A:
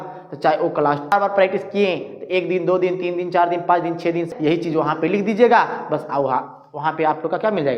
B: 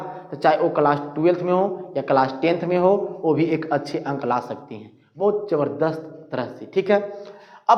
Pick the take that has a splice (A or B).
A